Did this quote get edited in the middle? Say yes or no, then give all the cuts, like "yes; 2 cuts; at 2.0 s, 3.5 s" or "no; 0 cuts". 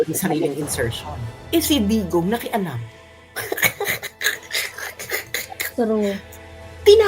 yes; 2 cuts; at 1.3 s, 5.7 s